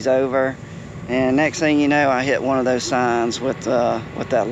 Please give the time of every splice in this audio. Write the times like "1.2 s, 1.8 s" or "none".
none